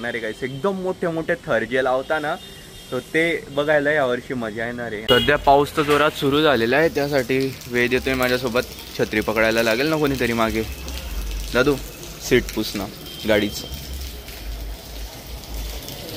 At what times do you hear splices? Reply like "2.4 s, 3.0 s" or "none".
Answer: none

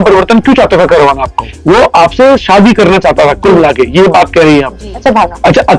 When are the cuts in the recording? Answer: 1.5 s, 4.9 s

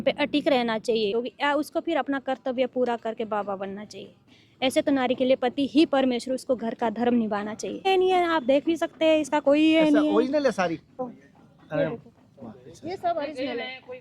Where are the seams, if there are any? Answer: 1.2 s, 7.9 s, 11.0 s

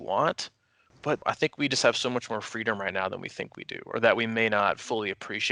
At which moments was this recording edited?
1.2 s

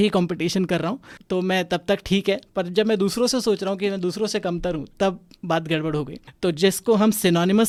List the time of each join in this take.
none

